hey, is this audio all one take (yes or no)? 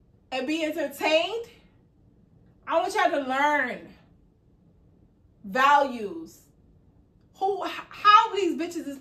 yes